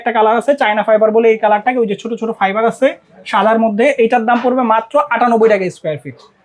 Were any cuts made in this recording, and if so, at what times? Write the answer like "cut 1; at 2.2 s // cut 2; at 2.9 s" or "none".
none